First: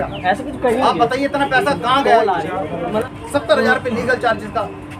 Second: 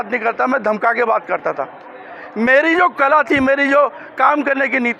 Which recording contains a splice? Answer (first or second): first